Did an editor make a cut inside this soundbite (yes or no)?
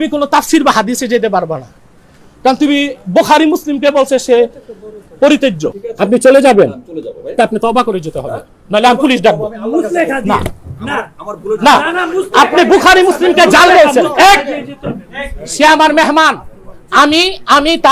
yes